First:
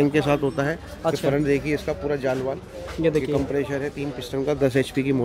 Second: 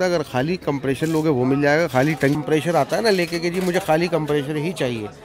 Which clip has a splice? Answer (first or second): second